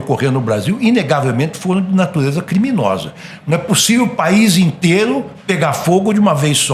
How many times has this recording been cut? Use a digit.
0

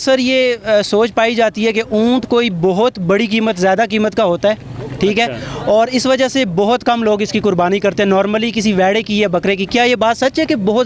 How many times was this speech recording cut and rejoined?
0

